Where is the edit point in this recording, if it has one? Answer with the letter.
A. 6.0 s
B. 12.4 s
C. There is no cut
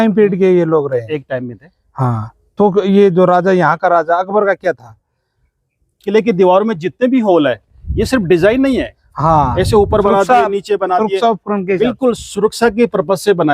A